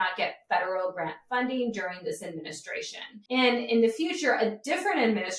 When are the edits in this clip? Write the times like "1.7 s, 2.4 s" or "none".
3.2 s